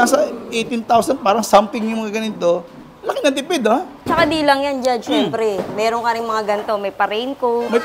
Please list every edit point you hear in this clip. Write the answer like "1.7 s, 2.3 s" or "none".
none